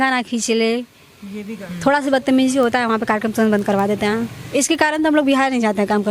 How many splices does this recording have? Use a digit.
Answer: 2